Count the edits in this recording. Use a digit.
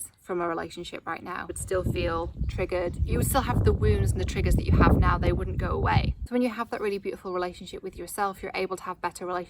3